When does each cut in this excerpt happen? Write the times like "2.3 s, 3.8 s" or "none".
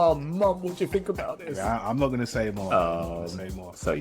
1.6 s